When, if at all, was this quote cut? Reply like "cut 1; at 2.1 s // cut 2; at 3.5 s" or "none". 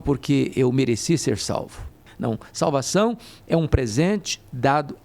cut 1; at 2.0 s